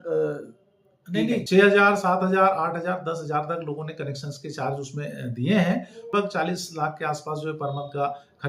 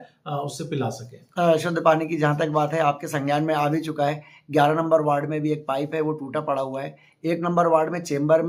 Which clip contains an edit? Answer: first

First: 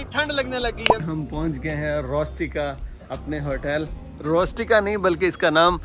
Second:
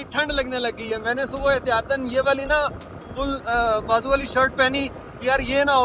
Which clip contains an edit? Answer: first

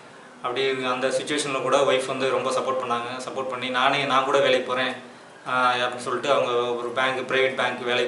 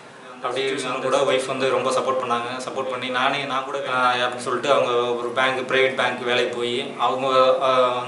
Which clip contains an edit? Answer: second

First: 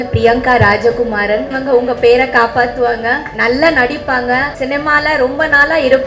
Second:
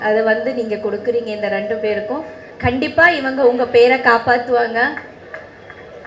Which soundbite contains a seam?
first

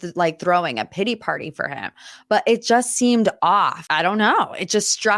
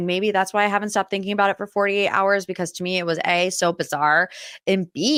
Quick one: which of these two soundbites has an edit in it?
first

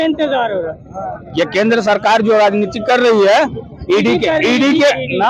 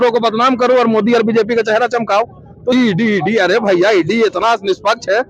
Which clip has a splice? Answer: second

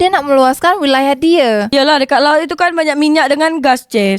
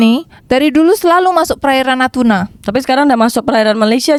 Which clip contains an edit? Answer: first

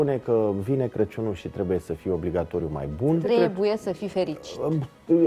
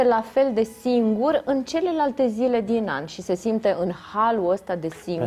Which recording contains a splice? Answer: first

